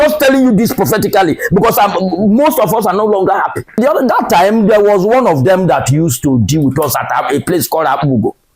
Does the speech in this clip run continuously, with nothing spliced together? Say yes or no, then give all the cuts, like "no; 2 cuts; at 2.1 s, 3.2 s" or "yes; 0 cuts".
no; 1 cut; at 3.8 s